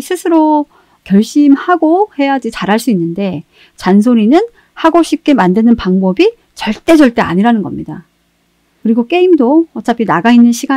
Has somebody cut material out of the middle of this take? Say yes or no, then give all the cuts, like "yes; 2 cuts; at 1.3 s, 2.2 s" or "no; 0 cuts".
no; 0 cuts